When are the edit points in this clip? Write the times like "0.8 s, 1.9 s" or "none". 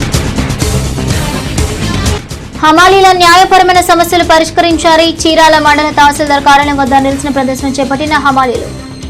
1.4 s